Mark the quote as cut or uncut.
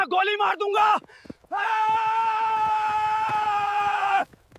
uncut